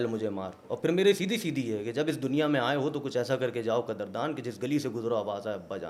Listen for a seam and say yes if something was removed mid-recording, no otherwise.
no